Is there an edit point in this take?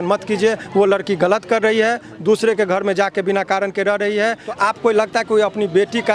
yes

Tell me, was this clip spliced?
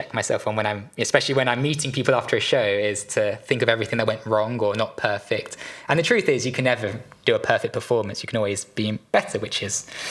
no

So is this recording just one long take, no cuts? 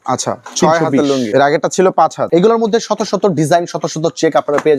no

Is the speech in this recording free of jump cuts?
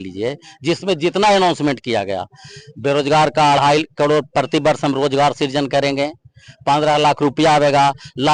yes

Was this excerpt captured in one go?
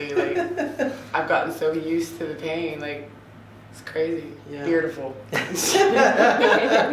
no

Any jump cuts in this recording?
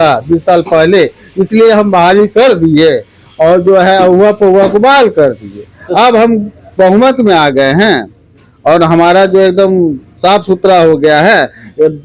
no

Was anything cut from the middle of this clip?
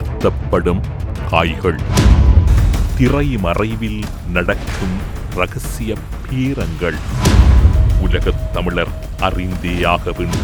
no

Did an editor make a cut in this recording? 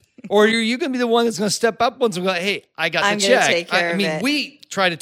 no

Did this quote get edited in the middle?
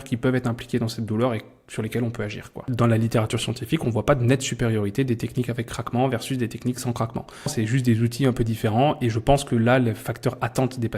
yes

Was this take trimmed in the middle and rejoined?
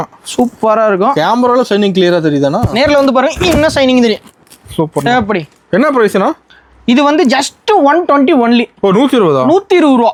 no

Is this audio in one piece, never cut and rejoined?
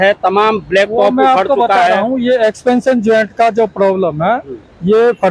yes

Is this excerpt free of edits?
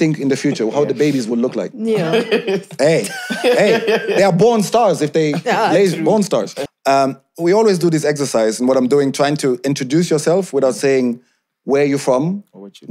no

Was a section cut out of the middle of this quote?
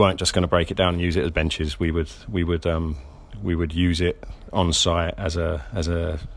no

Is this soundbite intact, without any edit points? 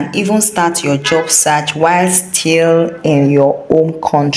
yes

